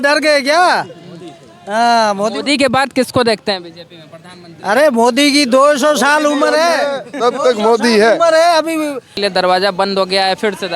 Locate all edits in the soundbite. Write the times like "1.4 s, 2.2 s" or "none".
9.2 s

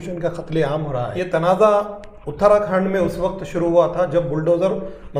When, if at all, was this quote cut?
1.1 s

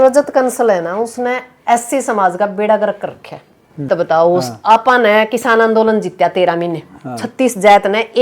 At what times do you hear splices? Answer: 3.9 s

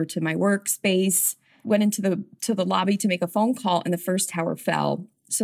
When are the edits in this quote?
1.5 s

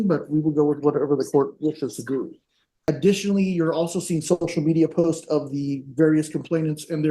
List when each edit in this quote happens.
2.7 s

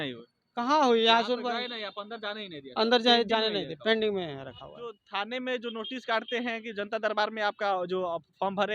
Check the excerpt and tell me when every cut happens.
5.0 s

